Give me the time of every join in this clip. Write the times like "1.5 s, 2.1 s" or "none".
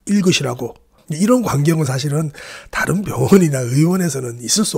1.0 s